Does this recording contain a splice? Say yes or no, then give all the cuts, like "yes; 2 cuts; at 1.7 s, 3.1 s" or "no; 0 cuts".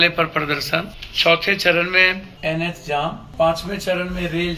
yes; 3 cuts; at 1.0 s, 2.3 s, 3.2 s